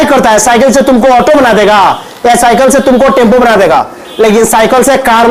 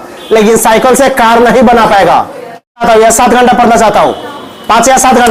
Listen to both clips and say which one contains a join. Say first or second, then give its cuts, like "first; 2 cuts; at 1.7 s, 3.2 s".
second; 1 cut; at 2.8 s